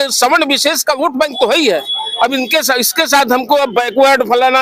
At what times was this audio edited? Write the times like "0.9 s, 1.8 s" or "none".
none